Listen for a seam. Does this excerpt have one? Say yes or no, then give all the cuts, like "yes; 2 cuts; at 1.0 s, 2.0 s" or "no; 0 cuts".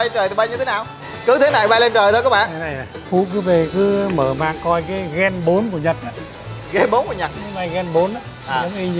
yes; 1 cut; at 3.0 s